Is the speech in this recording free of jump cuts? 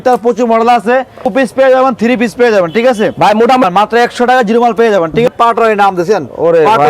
no; 3 cuts; at 1.3 s, 3.6 s, 5.3 s

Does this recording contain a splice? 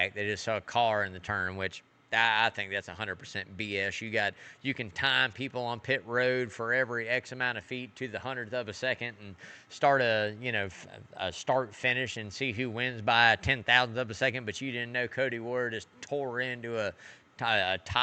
no; 0 cuts

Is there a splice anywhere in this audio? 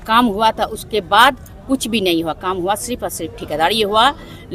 no; 0 cuts

